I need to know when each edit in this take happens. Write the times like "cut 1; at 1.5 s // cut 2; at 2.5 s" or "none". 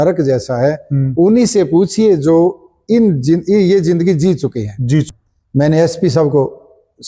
cut 1; at 5.1 s